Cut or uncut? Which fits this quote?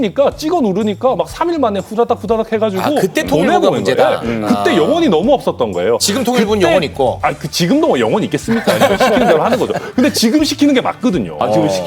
uncut